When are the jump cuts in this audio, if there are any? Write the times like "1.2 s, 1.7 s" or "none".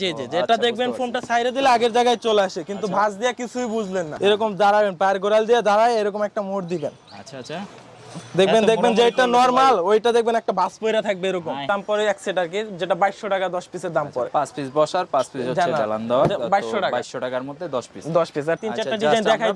4.1 s, 11.6 s, 18.6 s